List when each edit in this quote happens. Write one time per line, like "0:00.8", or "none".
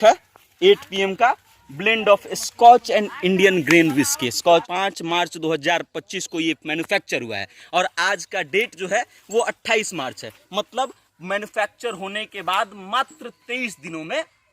0:04.6